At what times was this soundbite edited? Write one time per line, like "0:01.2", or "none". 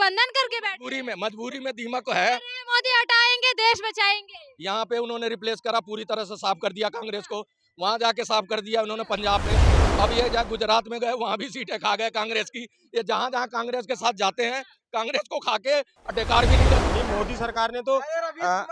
0:16.8